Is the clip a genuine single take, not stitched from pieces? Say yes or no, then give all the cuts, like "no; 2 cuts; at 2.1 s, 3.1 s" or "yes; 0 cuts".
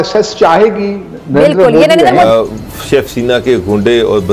no; 1 cut; at 2.3 s